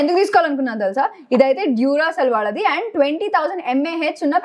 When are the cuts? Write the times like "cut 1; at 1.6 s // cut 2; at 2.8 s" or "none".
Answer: none